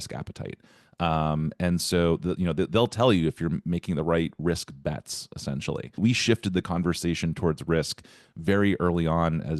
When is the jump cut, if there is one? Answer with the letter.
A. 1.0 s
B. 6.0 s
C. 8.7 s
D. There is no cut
B